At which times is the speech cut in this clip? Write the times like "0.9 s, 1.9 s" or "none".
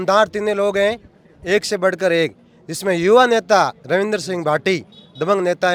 none

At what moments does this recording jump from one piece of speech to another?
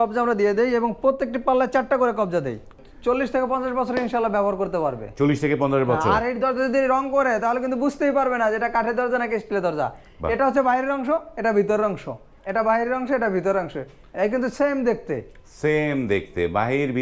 2.8 s

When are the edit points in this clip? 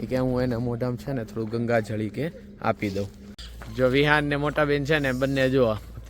3.7 s

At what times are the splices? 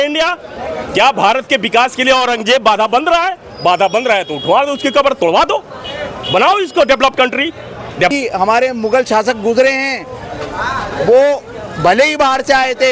8.1 s

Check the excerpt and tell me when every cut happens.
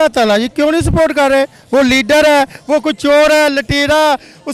none

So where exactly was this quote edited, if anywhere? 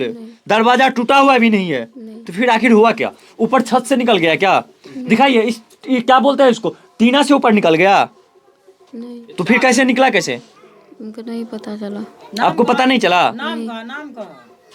none

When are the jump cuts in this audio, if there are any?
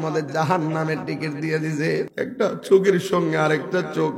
2.1 s

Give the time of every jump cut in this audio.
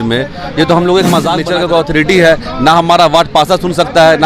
1.4 s

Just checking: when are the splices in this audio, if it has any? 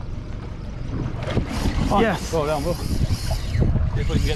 none

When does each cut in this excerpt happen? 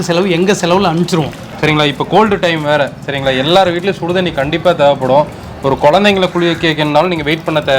1.4 s

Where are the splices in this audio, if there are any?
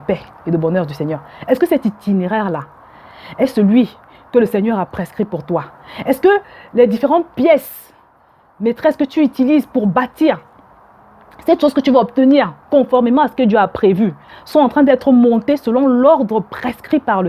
14.3 s

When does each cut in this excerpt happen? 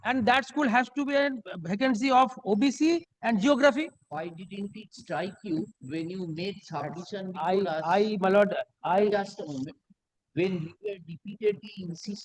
none

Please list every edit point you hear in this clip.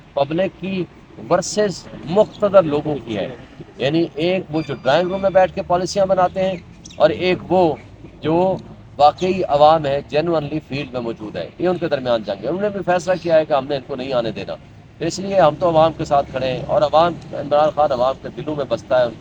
none

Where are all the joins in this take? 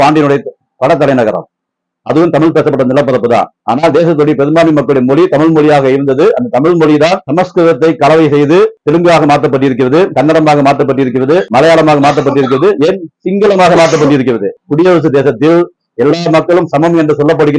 3.6 s, 14.5 s

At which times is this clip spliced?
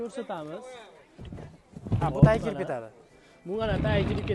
none

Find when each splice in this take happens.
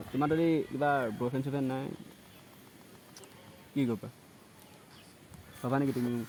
none

